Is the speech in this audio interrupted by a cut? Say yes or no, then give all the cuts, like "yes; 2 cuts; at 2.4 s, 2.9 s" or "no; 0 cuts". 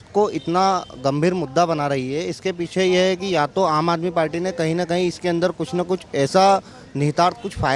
no; 0 cuts